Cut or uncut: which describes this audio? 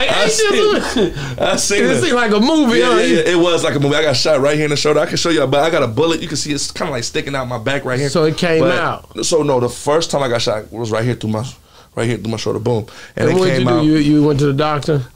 uncut